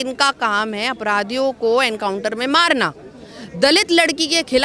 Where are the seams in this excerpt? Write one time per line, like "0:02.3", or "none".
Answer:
none